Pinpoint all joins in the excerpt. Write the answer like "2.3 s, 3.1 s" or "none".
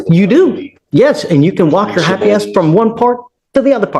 none